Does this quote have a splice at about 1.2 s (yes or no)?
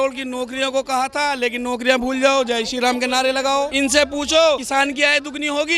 no